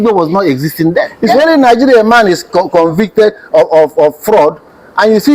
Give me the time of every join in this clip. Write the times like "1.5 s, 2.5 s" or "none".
1.2 s